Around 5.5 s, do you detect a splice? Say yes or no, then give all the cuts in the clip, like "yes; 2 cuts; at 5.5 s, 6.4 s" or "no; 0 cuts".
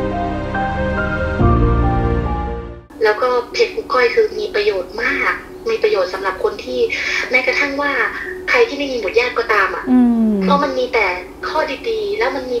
no; 1 cut; at 2.8 s